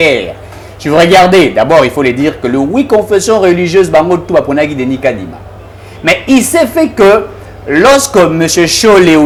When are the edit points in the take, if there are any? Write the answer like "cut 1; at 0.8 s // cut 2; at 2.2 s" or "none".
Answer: none